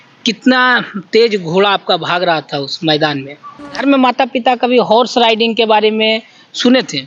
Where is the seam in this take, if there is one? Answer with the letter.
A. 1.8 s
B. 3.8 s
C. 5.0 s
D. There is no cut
B